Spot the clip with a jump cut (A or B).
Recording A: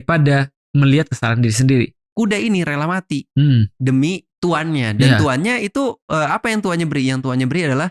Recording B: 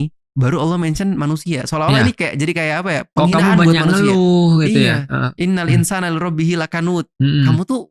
A